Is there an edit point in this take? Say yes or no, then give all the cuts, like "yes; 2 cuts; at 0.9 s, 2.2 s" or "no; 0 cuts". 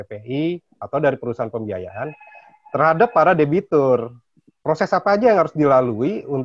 no; 0 cuts